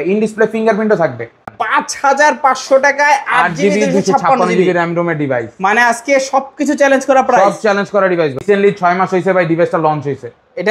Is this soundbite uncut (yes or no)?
no